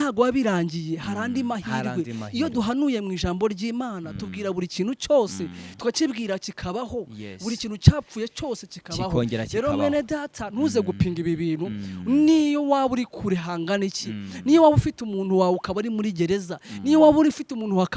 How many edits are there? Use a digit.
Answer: 0